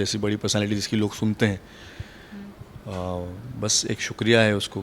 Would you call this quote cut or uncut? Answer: uncut